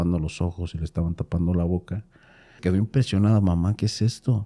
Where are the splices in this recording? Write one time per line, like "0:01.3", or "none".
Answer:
0:02.5